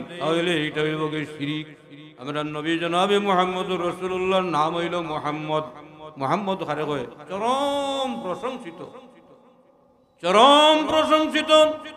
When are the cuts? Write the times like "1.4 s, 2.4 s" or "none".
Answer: 1.6 s